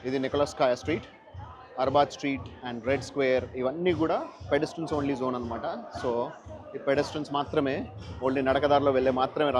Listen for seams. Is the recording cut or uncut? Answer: uncut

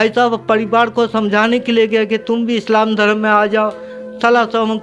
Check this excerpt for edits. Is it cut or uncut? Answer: uncut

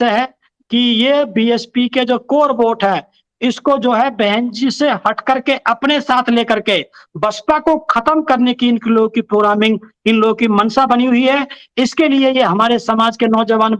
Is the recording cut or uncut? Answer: uncut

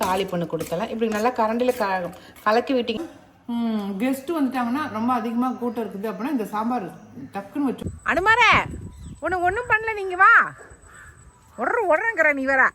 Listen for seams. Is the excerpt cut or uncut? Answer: cut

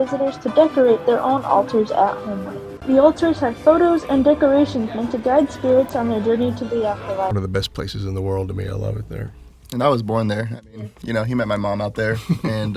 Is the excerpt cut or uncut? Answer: cut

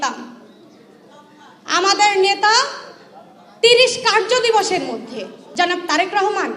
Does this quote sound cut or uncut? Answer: cut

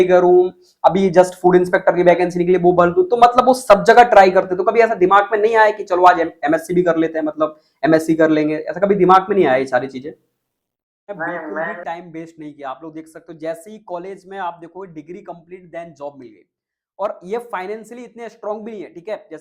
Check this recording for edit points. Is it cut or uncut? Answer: cut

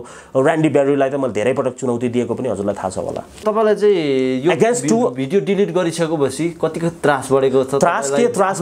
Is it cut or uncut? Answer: cut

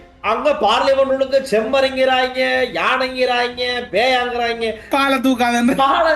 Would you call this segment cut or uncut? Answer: cut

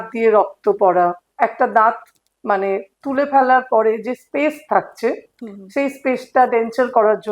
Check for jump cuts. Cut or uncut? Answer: cut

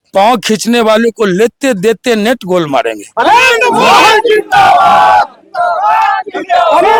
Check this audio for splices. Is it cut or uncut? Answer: uncut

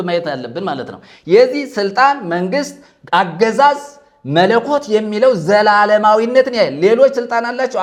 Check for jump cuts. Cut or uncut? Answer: uncut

